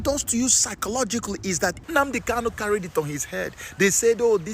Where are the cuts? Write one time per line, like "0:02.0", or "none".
0:01.8